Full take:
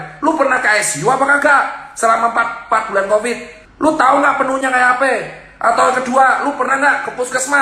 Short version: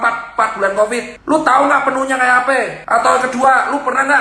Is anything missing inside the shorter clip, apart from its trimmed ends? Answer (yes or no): yes